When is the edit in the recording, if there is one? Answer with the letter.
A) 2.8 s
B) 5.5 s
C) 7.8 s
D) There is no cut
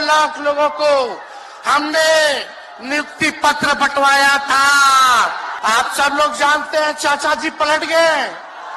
B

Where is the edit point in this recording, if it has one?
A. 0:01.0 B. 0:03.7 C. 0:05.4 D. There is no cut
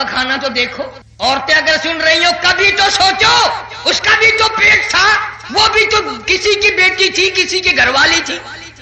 A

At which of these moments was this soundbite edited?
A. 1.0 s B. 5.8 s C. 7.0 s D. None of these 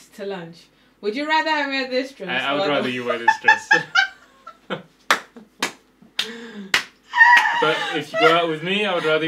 D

